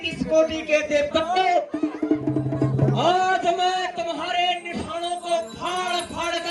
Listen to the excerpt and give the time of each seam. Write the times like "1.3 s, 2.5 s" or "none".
none